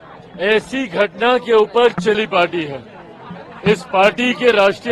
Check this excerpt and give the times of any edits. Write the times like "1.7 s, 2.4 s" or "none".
2.2 s